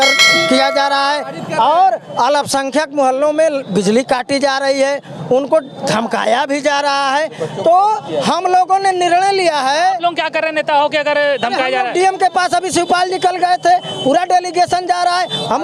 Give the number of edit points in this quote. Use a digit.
0